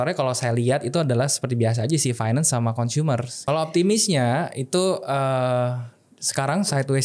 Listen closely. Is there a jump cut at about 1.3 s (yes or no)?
no